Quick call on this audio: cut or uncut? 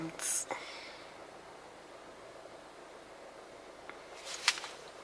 uncut